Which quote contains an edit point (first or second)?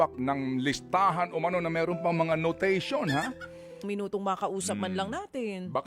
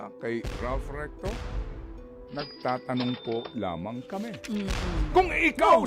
first